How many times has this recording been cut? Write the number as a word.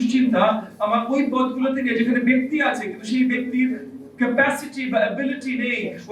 zero